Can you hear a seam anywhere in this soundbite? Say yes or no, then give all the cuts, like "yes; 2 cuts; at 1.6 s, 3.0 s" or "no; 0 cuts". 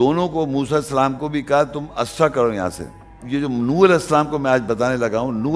yes; 1 cut; at 3.2 s